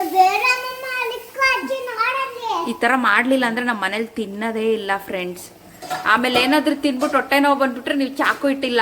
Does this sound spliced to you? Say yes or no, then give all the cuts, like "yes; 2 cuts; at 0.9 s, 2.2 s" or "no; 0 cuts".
no; 0 cuts